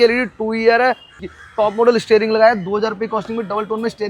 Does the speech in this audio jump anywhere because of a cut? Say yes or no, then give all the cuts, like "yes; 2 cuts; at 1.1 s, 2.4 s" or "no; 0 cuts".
yes; 1 cut; at 1.1 s